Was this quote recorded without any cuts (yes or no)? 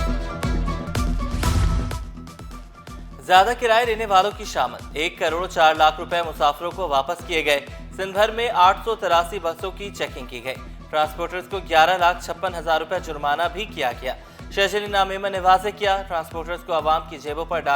no